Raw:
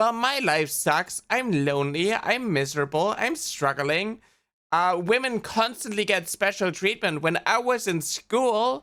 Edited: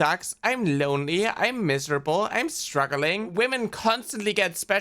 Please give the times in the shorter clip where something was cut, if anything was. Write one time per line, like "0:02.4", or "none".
0:03.3